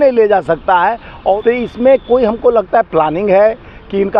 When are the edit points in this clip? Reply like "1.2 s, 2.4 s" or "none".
1.4 s